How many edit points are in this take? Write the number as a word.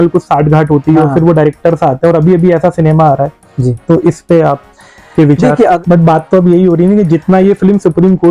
one